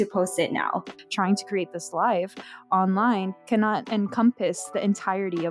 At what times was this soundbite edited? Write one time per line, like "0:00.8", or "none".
0:01.0
0:03.8